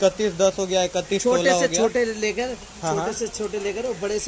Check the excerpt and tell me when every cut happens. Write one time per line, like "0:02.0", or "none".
none